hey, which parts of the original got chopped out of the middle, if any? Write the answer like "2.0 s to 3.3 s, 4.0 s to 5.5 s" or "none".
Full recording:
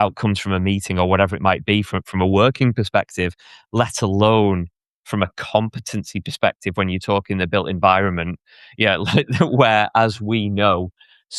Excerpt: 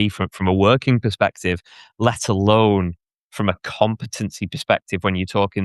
none